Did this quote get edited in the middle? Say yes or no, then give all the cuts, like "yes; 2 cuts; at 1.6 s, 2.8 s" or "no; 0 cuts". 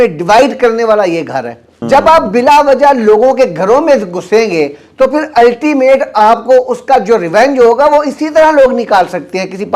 yes; 1 cut; at 1.7 s